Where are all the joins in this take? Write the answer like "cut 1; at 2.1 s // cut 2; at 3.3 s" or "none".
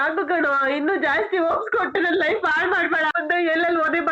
cut 1; at 3.1 s